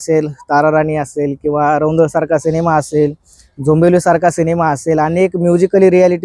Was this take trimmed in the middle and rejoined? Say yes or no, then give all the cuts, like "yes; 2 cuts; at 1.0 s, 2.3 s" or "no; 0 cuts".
no; 0 cuts